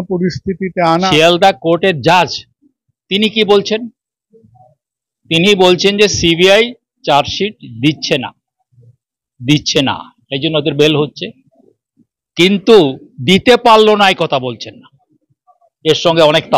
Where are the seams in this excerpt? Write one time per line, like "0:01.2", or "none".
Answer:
0:01.0

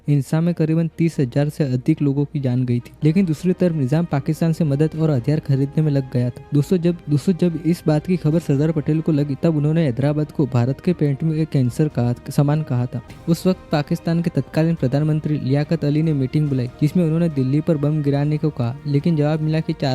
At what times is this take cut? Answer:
0:02.9
0:13.1

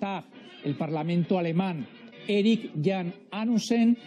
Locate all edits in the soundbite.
0:01.4

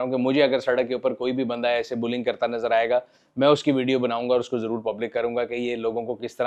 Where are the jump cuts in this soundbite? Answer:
none

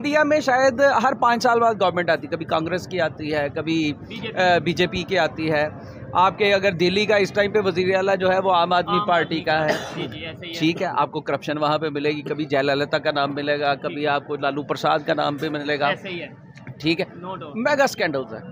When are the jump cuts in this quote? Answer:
none

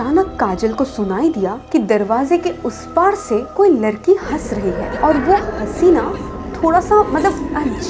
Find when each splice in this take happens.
none

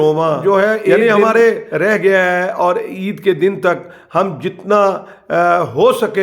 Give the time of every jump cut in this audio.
0:01.7

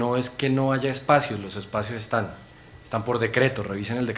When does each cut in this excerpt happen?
none

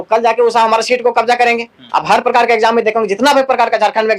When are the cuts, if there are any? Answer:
none

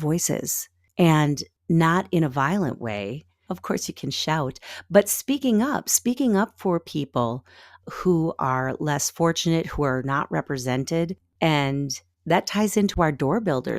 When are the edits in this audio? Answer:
0:03.3
0:11.2

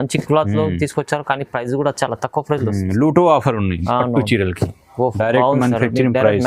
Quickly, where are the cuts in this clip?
0:05.1

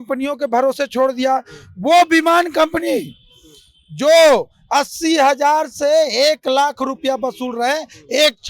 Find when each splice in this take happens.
none

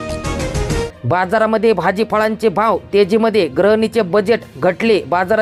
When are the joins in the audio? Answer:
none

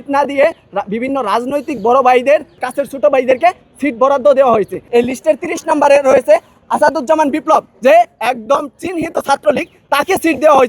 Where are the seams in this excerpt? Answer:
0:02.7
0:04.8
0:06.6

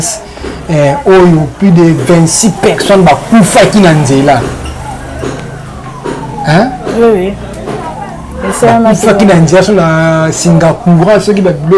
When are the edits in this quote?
none

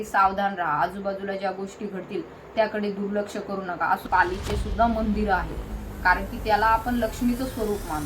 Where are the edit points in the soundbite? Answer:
0:04.0

